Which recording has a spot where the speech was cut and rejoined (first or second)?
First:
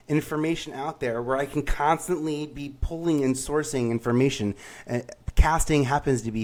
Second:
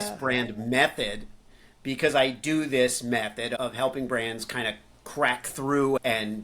second